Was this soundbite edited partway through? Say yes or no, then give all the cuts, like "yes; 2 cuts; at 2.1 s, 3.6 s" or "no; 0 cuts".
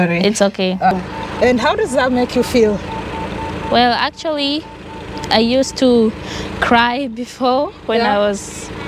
yes; 1 cut; at 1.1 s